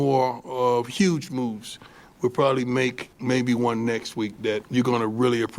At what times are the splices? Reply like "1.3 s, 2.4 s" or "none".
3.1 s, 4.7 s